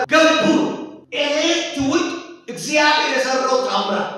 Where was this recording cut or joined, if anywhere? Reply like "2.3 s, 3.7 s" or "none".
1.0 s

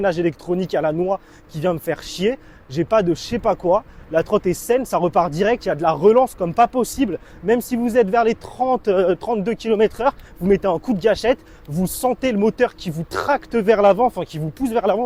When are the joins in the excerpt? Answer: none

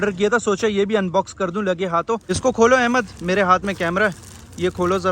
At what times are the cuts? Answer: 2.3 s

